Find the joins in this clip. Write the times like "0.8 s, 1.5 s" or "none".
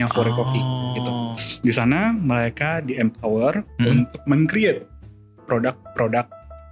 none